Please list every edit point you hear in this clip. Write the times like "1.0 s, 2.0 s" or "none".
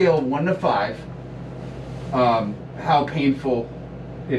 none